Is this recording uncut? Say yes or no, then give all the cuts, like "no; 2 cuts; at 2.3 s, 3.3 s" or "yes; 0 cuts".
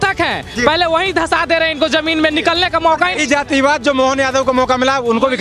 yes; 0 cuts